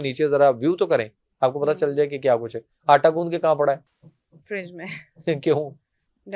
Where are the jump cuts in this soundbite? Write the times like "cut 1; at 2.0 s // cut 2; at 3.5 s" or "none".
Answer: none